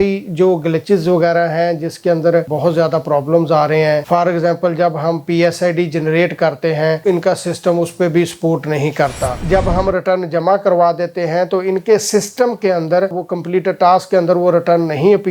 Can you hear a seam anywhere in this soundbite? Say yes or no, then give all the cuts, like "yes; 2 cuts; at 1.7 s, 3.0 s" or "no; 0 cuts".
yes; 3 cuts; at 2.5 s, 7.0 s, 9.4 s